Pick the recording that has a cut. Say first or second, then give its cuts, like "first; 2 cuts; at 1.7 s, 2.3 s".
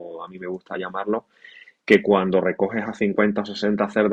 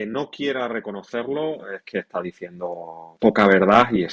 second; 1 cut; at 3.1 s